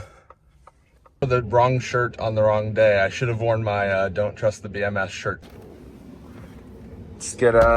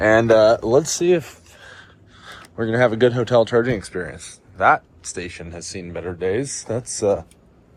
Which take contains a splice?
first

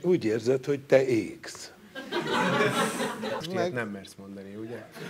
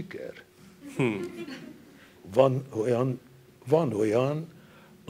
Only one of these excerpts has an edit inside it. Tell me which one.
first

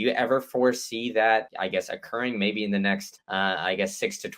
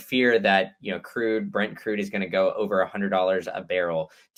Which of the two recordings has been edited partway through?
first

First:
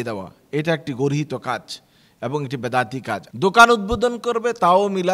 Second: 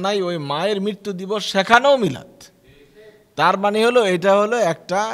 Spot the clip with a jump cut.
first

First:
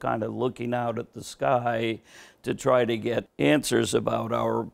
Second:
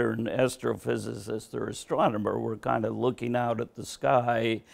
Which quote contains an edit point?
first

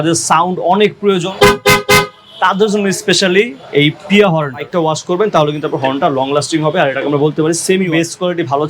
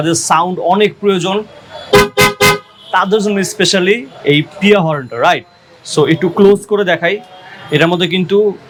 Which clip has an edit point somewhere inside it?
first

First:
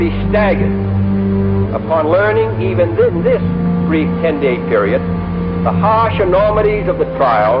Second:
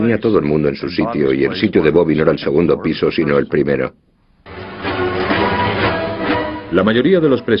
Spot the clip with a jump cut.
first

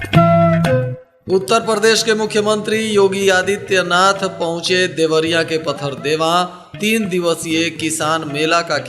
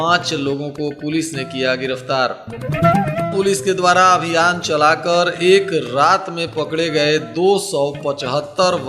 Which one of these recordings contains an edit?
first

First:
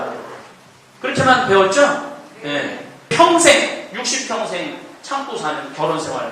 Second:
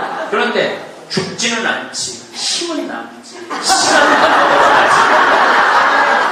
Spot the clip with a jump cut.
first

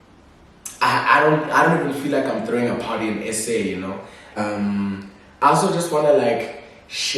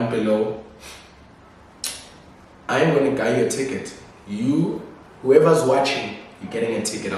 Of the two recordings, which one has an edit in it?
first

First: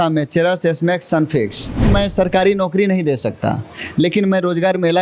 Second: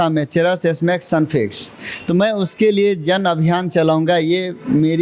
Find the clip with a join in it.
first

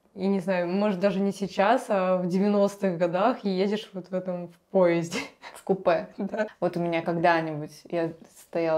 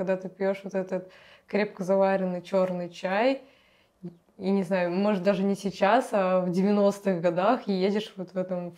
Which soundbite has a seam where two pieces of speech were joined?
first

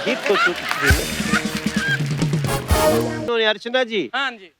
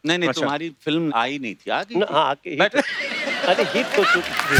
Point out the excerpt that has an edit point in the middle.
first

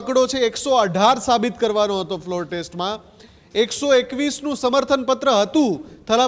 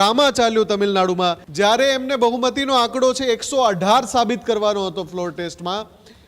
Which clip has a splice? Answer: second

